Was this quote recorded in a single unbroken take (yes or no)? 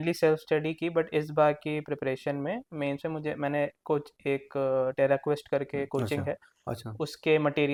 yes